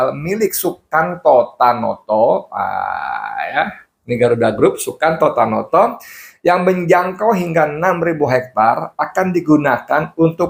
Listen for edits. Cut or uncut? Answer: uncut